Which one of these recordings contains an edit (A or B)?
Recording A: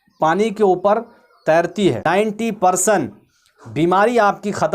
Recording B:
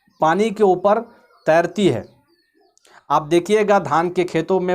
A